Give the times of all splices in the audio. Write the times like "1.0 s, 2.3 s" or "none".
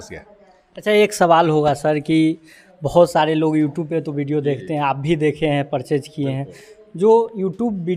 none